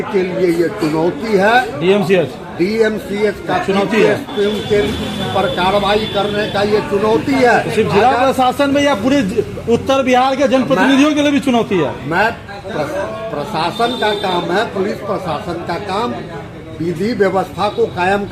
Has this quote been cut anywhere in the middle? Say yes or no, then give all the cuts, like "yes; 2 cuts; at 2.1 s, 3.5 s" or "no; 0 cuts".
no; 0 cuts